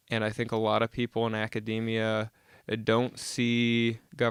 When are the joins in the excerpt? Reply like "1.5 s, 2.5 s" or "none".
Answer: none